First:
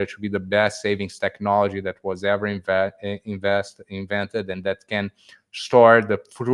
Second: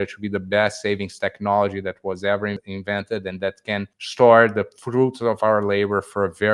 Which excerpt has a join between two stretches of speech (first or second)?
second